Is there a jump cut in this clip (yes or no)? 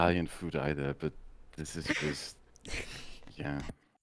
no